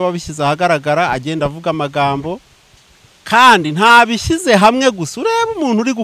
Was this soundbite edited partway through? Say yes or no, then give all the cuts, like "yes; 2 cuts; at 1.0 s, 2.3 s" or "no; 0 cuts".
no; 0 cuts